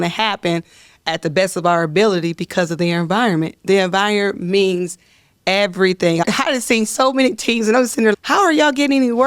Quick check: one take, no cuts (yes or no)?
no